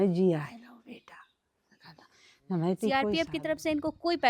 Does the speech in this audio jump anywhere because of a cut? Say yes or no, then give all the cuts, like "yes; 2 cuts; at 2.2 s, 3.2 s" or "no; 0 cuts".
yes; 1 cut; at 3.0 s